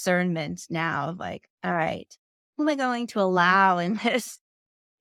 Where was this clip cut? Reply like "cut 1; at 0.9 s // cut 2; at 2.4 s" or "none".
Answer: none